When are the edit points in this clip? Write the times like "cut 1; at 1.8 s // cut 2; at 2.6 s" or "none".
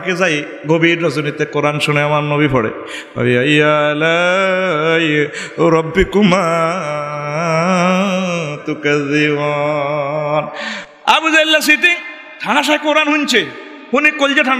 cut 1; at 10.7 s

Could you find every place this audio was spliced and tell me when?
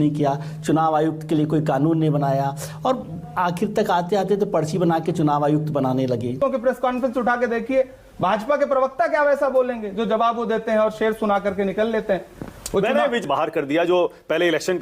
cut 1; at 6.3 s // cut 2; at 13.2 s

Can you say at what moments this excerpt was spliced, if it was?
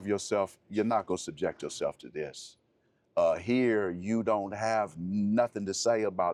none

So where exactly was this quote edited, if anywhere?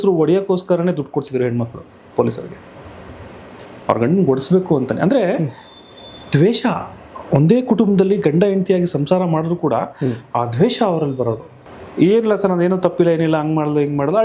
cut 1; at 11.6 s

